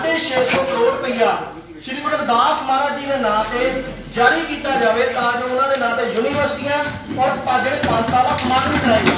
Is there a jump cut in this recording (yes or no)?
no